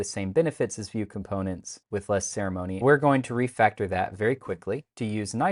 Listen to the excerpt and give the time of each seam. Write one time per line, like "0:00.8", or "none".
0:02.7